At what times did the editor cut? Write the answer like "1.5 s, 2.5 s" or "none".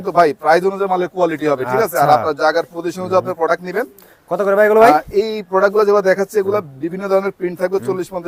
none